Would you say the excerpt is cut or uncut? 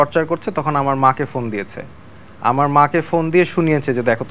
uncut